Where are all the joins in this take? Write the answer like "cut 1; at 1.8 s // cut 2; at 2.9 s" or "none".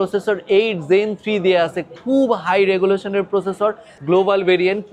cut 1; at 3.9 s